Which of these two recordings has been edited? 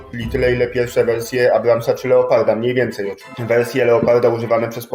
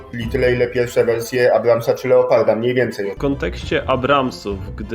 second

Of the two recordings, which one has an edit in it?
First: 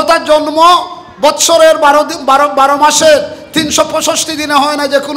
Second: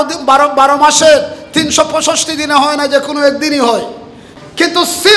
second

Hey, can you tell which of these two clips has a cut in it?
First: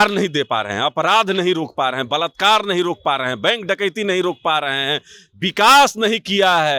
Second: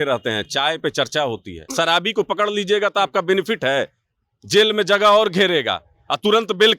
second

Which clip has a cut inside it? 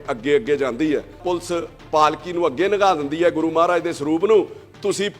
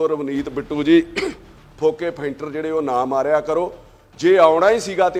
first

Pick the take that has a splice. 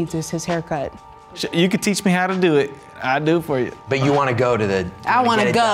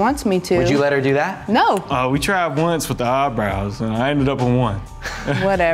first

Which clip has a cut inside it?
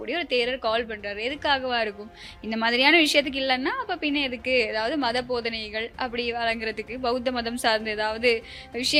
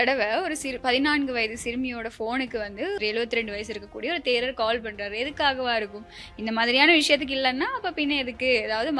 second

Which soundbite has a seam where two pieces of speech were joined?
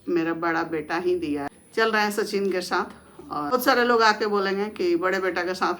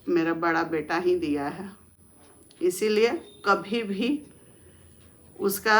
first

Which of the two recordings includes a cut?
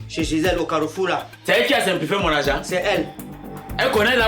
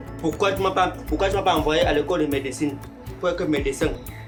first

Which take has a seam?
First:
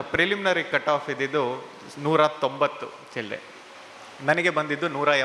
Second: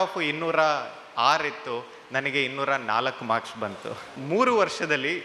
second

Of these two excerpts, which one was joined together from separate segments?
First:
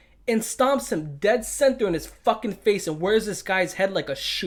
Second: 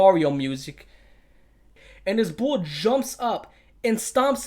second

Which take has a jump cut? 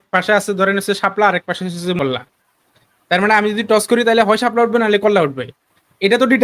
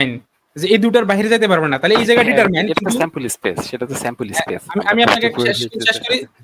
first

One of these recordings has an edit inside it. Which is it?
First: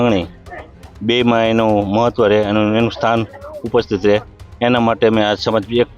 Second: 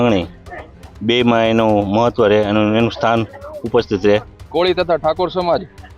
second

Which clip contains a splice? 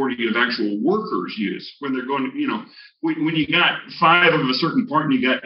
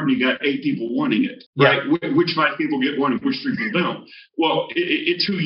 second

